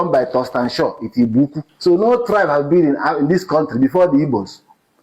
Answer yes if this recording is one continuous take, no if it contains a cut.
no